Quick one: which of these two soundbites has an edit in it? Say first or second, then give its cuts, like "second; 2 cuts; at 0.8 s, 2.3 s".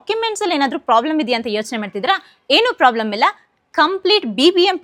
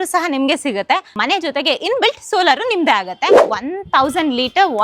second; 2 cuts; at 1.1 s, 3.5 s